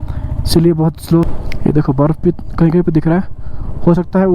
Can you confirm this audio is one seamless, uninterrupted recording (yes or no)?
no